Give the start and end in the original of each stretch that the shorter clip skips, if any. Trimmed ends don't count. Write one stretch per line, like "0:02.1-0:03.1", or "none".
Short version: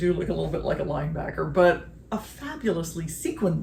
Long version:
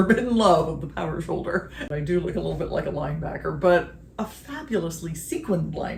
none